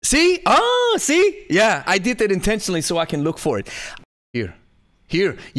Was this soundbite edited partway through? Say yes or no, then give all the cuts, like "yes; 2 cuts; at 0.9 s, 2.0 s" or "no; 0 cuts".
yes; 1 cut; at 3.8 s